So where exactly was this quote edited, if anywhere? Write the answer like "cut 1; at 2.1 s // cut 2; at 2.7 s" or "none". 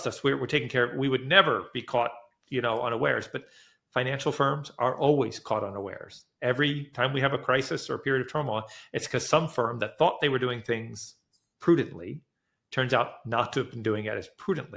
none